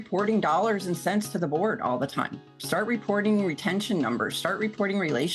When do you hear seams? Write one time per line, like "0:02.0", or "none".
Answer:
none

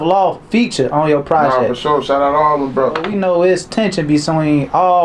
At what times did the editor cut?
0:03.1

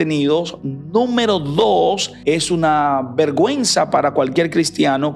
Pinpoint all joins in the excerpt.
0:02.1

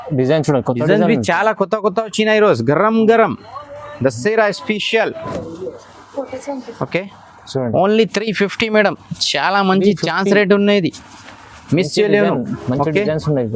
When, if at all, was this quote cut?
0:05.3

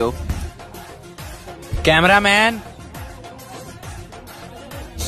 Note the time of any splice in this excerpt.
none

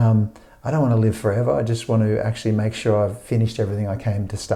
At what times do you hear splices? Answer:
none

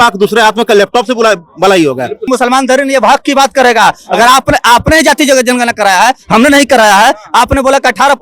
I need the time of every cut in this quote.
0:02.3

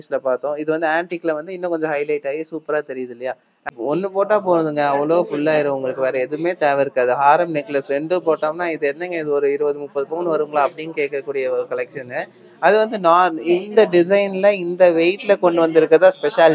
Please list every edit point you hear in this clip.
0:03.7

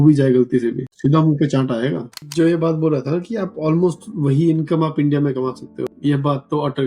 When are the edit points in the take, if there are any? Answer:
0:00.9
0:02.2
0:05.9

